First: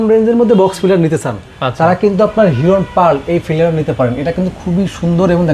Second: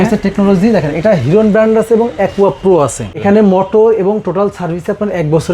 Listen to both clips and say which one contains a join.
second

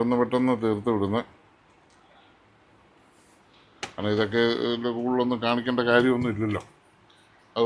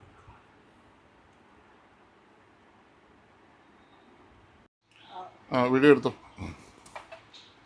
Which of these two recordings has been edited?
second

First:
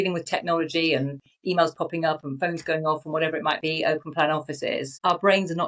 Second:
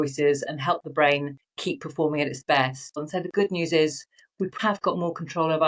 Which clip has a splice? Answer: second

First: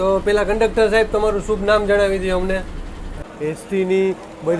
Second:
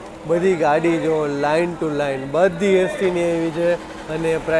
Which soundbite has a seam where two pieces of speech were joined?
first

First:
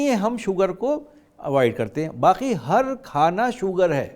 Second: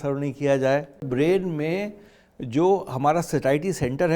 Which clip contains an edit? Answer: second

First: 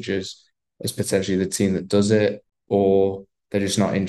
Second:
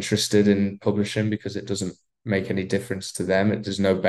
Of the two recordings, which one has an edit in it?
first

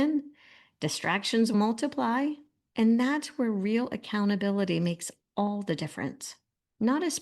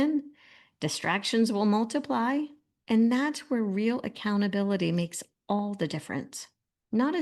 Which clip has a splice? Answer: first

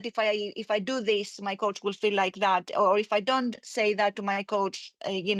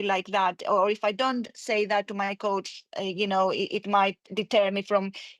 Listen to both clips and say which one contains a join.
second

